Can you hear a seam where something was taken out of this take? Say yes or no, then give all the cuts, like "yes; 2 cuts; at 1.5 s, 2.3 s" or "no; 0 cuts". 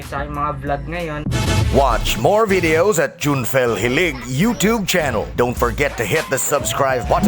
yes; 1 cut; at 1.6 s